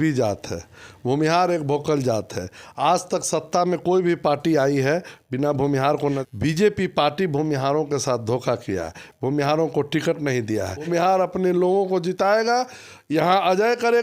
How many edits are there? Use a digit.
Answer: 2